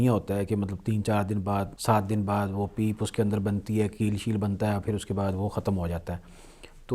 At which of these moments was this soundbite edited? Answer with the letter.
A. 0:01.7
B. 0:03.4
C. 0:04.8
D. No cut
A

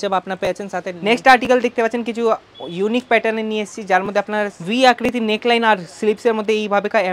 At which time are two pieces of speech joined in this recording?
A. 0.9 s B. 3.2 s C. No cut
A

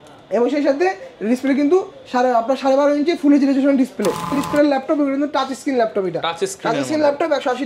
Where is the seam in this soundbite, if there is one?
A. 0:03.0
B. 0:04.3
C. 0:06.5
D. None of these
B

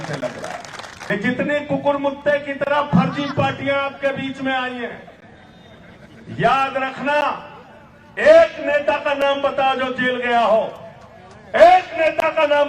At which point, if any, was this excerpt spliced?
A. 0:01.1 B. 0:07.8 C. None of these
A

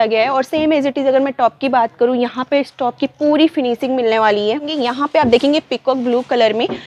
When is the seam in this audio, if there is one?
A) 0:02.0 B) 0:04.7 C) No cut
B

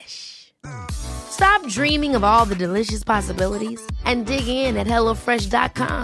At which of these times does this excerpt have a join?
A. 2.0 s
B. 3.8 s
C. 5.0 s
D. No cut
D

